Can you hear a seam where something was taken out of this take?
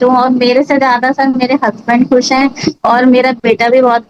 no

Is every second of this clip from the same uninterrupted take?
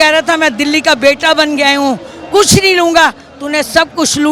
yes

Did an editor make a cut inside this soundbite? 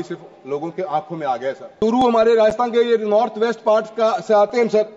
yes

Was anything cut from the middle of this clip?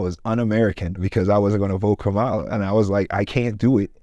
yes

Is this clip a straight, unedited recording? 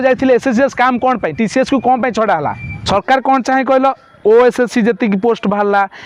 no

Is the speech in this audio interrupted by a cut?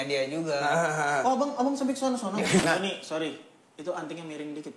yes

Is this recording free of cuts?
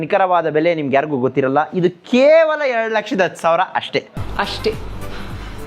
no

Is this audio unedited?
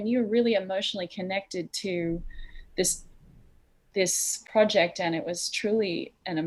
yes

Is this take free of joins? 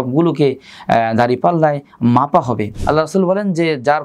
no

